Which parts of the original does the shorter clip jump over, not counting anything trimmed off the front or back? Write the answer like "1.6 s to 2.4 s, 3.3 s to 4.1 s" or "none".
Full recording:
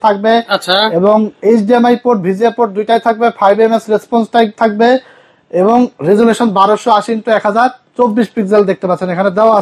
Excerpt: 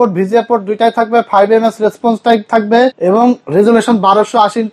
5.0 s to 5.5 s